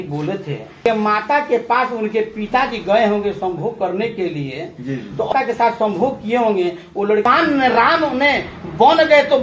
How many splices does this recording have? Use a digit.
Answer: 3